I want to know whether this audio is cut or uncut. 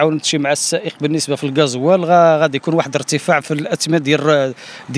uncut